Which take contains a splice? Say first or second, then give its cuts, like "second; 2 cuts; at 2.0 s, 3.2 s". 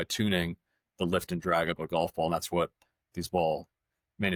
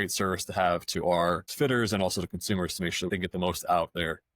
second; 2 cuts; at 1.5 s, 3.1 s